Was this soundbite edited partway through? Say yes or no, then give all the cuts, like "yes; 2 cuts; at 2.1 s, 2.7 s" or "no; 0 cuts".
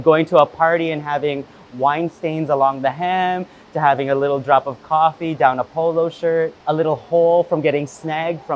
no; 0 cuts